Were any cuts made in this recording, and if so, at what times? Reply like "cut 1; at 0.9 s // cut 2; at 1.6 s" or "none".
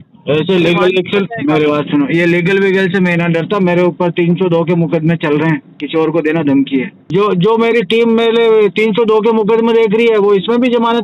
cut 1; at 5.7 s // cut 2; at 7.0 s